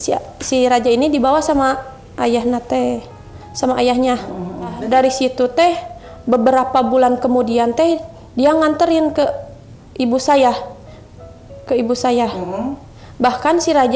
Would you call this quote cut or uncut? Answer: cut